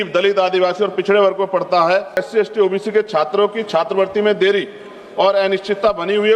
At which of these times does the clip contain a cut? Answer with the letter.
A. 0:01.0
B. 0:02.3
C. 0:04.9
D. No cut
B